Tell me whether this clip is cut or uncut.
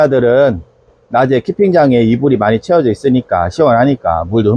uncut